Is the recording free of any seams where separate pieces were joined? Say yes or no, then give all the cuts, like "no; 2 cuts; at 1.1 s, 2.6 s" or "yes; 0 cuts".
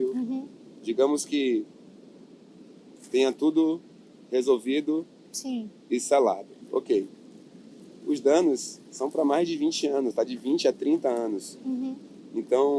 yes; 0 cuts